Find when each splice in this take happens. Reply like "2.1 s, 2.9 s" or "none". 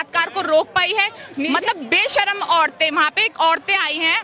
1.3 s

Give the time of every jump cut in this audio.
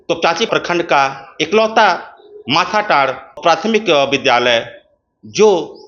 3.4 s

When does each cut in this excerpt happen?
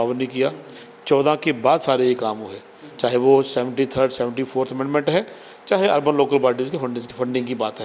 none

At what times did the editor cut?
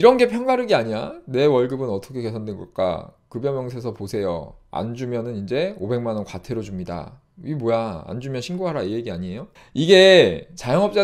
9.6 s

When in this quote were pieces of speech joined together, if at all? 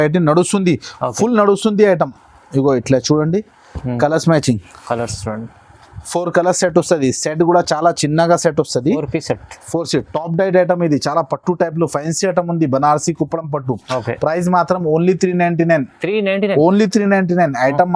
none

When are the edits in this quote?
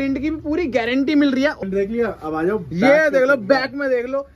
1.6 s

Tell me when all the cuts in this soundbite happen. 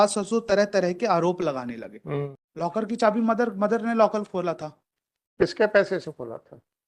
2.4 s

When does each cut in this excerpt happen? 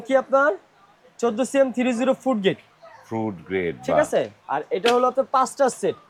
none

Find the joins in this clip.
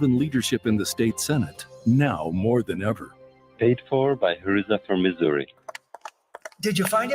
5.5 s

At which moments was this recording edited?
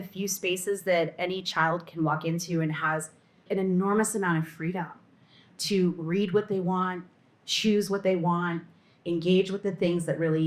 none

